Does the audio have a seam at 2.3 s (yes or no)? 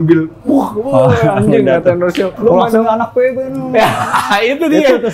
yes